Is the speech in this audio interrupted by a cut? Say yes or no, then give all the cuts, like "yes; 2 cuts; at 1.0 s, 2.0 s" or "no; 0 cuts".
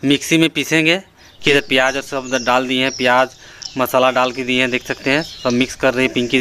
yes; 1 cut; at 1.4 s